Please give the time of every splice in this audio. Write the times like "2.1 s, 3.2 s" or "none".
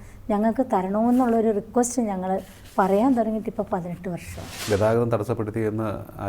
4.5 s